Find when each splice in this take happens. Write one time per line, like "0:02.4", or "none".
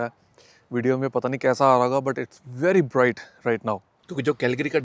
0:03.9